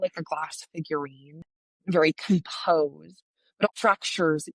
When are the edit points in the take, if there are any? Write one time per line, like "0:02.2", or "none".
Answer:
0:01.4
0:03.7